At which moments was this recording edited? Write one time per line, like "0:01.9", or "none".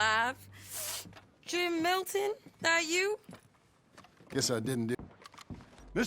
0:04.9